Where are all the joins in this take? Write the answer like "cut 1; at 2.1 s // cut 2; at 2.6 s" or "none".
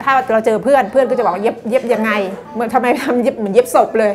cut 1; at 2.4 s